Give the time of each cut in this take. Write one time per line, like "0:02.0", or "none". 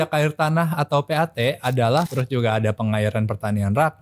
0:02.1